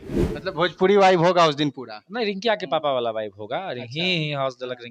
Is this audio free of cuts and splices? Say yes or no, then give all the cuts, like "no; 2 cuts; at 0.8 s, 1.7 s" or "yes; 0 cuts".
yes; 0 cuts